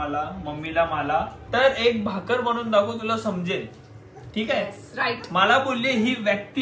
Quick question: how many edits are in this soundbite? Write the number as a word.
one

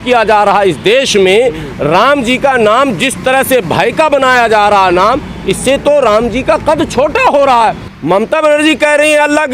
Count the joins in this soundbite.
one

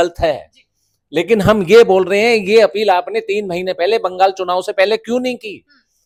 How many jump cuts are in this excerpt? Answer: zero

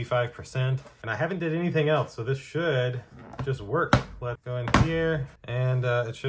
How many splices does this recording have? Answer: one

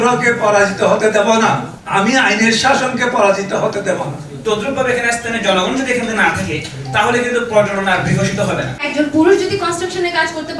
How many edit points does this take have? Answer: three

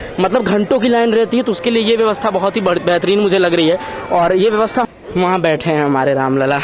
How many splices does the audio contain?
one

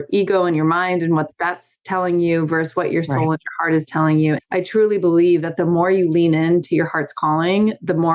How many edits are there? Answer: zero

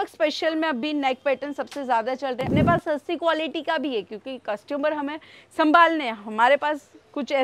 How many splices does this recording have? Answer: one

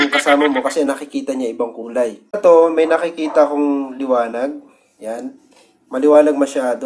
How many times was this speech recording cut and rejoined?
one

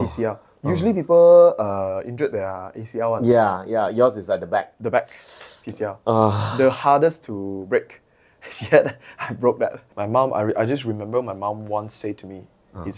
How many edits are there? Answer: one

